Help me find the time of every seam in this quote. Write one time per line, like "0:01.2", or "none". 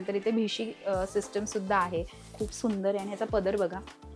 0:02.2